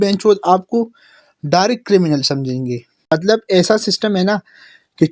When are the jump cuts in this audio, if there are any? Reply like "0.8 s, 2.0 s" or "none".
2.9 s